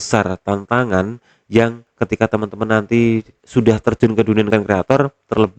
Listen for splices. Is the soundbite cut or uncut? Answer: cut